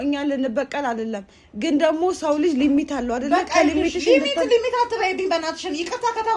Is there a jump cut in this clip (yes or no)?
no